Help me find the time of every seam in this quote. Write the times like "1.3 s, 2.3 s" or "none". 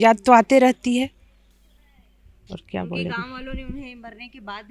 none